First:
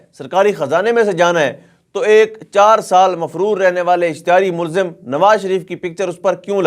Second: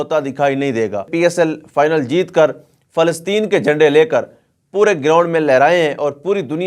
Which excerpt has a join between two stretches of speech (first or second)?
second